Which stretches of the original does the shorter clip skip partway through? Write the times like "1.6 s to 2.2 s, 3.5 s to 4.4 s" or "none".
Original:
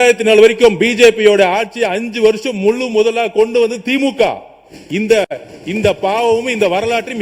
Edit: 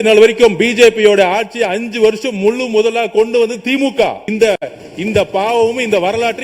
4.4 s to 4.9 s